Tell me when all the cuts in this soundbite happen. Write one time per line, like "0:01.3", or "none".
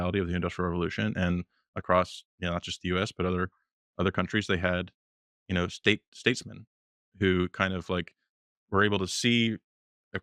none